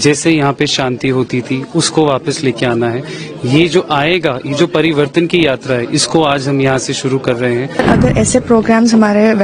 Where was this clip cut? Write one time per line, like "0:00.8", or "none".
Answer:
0:07.8